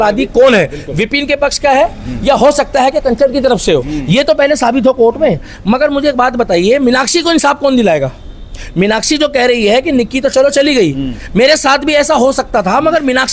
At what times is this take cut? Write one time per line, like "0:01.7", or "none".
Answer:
none